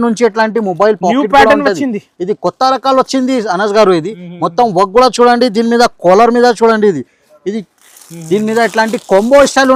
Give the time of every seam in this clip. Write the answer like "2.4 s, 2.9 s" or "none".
none